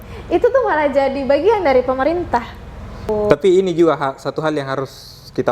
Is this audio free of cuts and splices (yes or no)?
no